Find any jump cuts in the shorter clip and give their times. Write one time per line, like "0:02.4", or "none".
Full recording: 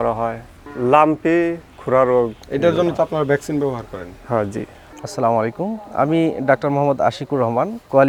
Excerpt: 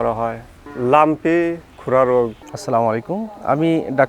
0:02.4